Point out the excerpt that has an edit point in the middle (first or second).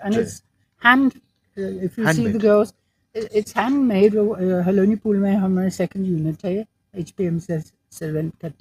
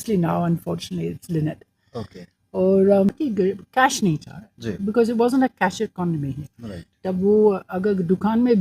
second